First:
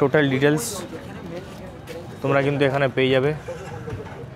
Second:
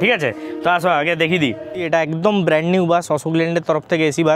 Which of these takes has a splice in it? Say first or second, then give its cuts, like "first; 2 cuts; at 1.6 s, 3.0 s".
second; 1 cut; at 1.9 s